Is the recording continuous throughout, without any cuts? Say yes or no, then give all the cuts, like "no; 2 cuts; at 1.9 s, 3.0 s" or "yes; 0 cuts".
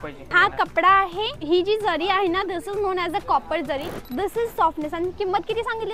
no; 2 cuts; at 1.3 s, 4.1 s